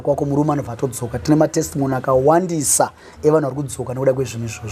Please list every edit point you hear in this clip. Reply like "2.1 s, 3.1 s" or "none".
none